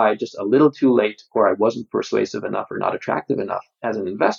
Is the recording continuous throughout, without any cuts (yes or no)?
yes